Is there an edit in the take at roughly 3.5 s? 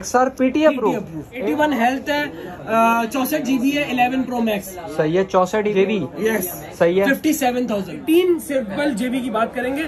no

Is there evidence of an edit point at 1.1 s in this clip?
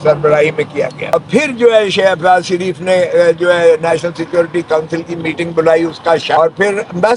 yes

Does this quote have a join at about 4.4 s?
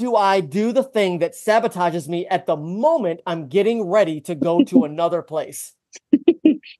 no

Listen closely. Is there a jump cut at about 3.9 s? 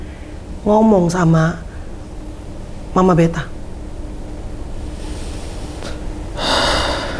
no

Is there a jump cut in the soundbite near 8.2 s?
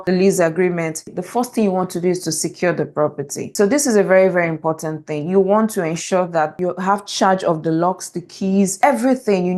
no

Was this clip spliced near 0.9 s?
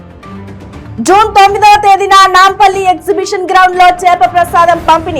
yes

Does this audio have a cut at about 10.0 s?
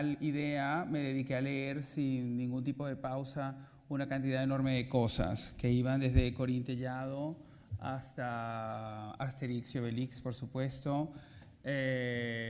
no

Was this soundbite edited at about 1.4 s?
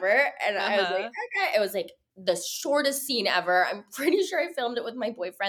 no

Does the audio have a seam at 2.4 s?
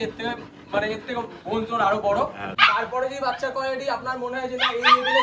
yes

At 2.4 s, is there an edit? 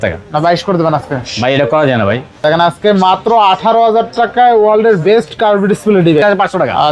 yes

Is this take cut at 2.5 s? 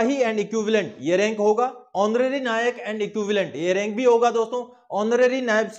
no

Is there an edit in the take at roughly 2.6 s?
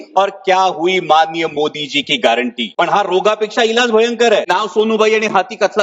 yes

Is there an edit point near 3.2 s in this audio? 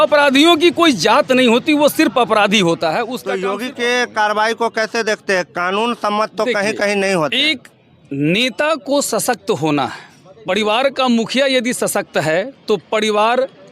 yes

